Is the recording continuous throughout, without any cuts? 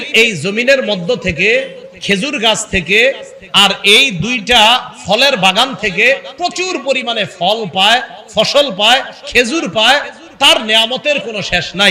yes; 0 cuts

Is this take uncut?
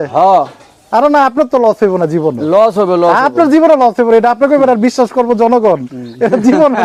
yes; 0 cuts

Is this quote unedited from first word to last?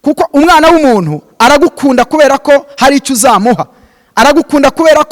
yes; 0 cuts

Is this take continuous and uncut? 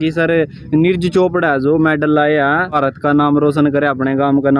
no; 1 cut; at 2.7 s

